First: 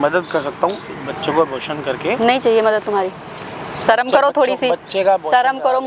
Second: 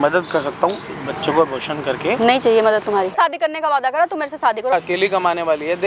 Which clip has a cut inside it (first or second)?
second